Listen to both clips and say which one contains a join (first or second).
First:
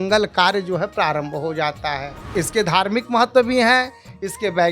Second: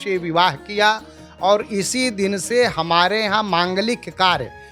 first